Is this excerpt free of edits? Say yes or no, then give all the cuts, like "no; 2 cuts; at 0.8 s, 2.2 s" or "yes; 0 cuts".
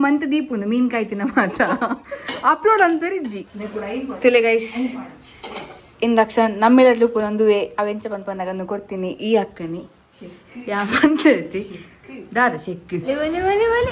no; 2 cuts; at 3.4 s, 13.0 s